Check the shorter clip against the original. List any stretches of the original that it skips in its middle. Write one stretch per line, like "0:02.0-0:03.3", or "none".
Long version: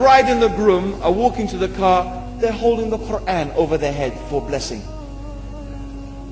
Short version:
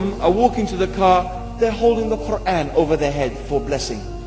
none